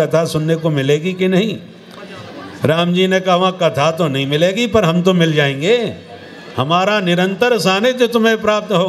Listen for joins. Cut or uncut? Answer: uncut